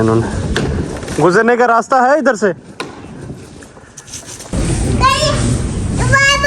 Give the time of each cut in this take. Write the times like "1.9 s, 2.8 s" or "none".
4.5 s

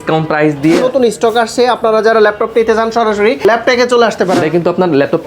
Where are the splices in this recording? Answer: 0.8 s, 3.4 s, 4.4 s

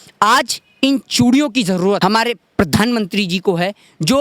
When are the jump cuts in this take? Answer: 2.0 s

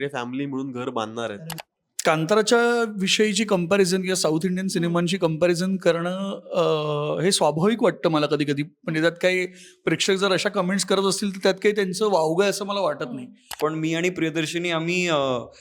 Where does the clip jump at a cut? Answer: 1.5 s, 13.5 s

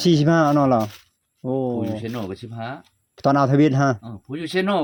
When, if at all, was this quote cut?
none

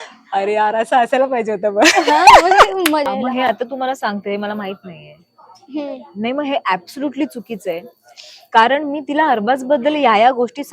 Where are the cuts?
3.1 s

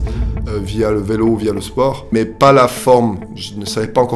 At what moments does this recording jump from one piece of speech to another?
2.1 s

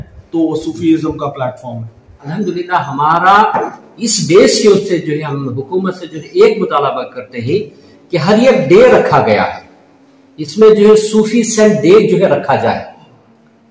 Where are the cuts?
2.3 s

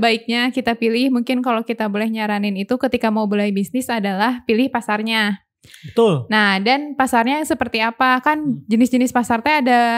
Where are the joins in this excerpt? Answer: none

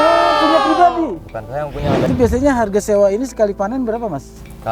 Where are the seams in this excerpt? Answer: 2.0 s

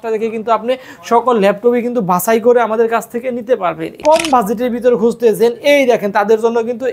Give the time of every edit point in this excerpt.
4.0 s

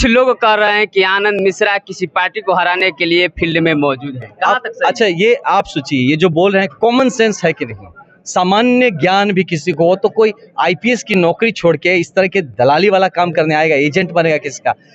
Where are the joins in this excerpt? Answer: none

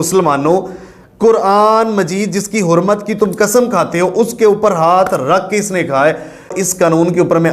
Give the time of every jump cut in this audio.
6.6 s

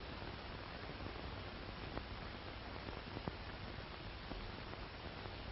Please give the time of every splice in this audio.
1.1 s

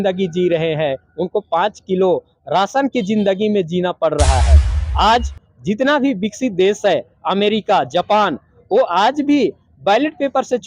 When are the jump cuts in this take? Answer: 4.6 s

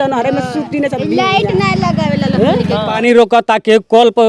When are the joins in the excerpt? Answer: 2.9 s

